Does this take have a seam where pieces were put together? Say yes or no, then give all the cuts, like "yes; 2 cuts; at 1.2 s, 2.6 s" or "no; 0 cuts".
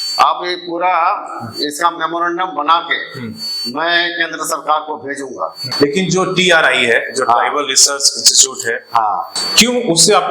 yes; 2 cuts; at 5.6 s, 9.4 s